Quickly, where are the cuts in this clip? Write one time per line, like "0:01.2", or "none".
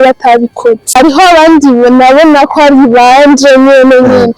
0:00.9